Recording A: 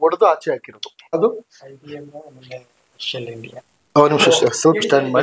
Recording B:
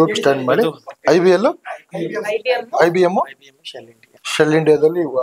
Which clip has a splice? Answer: A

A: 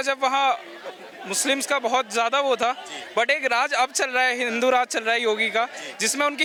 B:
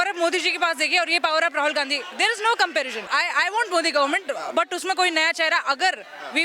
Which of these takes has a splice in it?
B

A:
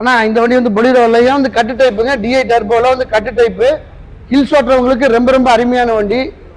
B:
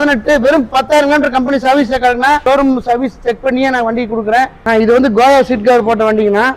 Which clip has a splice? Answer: B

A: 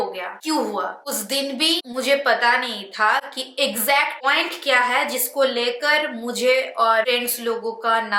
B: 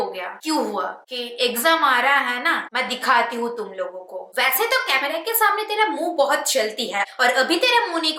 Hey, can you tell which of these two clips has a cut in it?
B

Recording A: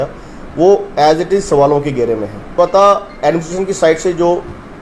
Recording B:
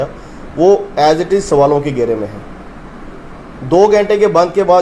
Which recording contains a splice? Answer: A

